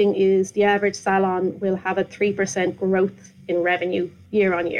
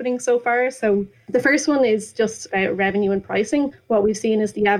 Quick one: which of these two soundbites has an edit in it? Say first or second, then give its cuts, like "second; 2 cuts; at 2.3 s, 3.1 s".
second; 3 cuts; at 1.2 s, 2.5 s, 3.8 s